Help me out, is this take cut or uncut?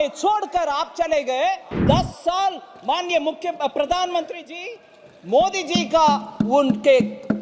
cut